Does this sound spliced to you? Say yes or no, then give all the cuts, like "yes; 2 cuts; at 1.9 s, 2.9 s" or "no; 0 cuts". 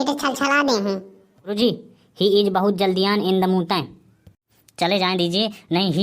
yes; 1 cut; at 1.5 s